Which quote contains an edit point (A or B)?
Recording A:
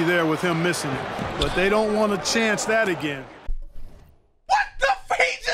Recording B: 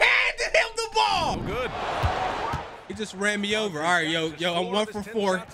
B